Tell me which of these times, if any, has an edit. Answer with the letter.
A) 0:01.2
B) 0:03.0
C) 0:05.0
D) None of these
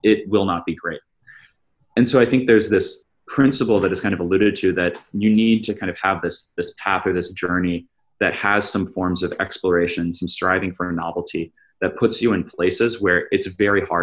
B